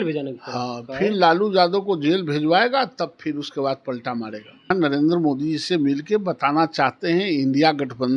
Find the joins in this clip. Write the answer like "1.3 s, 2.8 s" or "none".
4.7 s